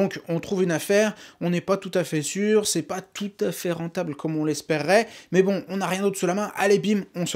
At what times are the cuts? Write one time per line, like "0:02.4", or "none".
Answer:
none

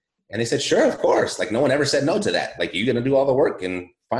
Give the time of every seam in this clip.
none

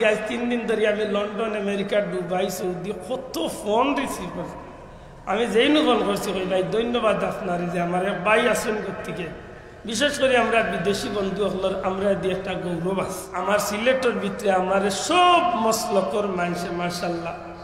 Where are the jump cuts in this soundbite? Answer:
0:13.3

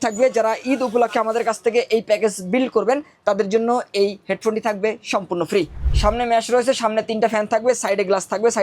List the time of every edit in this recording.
0:05.8

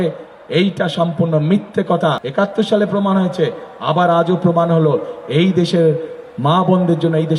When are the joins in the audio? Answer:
0:02.2

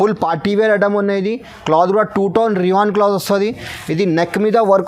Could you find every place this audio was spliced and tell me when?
none

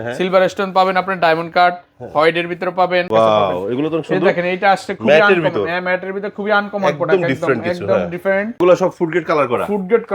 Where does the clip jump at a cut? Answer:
0:03.1
0:08.6

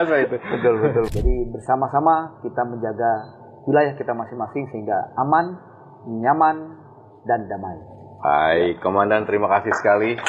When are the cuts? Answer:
0:01.1

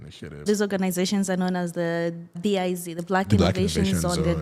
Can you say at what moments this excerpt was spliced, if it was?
none

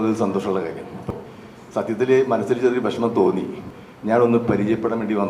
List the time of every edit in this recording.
0:01.1
0:03.6

